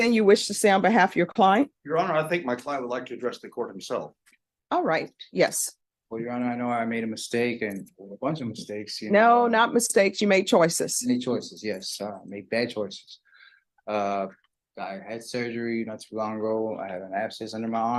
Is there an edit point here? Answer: no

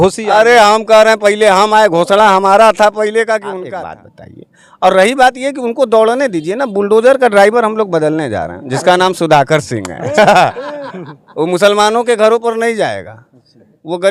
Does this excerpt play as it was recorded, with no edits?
no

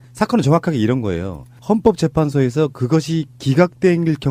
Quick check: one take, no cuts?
yes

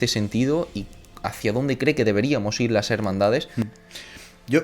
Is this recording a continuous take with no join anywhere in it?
no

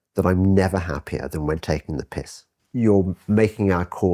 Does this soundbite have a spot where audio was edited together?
yes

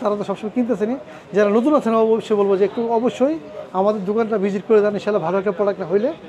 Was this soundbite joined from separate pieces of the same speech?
no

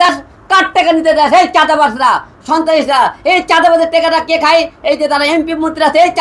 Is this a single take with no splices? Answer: yes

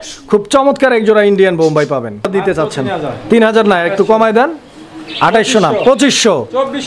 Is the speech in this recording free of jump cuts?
no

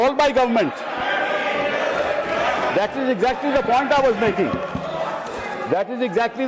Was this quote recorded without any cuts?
yes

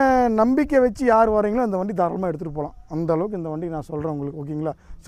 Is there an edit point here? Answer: no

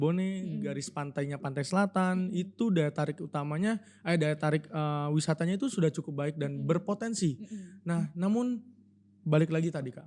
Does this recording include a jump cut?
no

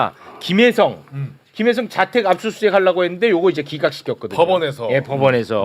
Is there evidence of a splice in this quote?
no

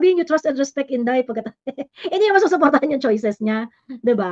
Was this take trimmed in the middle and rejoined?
no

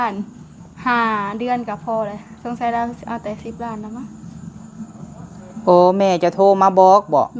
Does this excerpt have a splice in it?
no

